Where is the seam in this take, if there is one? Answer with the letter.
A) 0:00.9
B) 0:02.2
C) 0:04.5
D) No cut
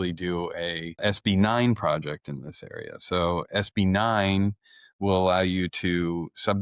A